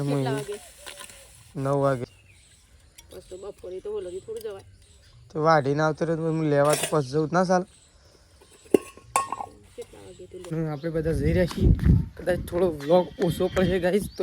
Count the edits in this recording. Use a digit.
2